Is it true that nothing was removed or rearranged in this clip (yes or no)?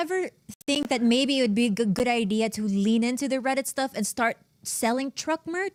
yes